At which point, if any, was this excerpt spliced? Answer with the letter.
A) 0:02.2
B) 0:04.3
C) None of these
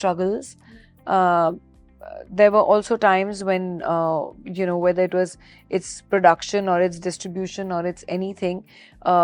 C